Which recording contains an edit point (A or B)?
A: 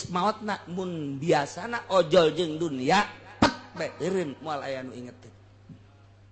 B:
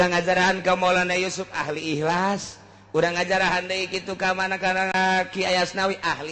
B